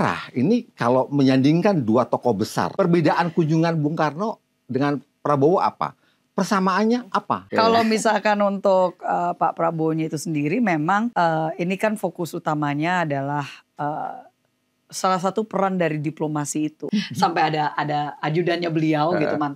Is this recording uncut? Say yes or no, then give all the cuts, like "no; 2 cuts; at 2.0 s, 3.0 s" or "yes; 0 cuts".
no; 4 cuts; at 2.7 s, 7.5 s, 11.1 s, 16.8 s